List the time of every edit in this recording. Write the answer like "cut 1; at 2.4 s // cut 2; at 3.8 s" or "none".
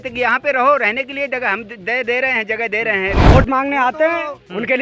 cut 1; at 3.2 s